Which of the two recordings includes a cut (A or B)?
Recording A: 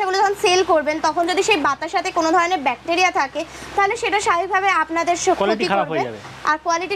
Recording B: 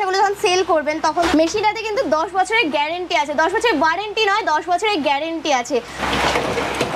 B